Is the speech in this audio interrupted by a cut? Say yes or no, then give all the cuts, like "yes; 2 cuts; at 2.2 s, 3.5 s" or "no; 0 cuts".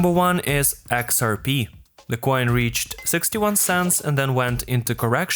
no; 0 cuts